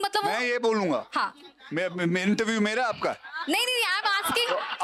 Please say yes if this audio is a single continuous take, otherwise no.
yes